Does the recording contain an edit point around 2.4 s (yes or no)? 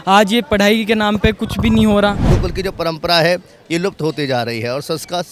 yes